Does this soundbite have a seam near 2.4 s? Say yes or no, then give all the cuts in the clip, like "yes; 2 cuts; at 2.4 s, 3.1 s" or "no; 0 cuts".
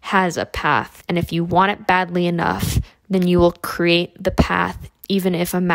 no; 1 cut; at 0.9 s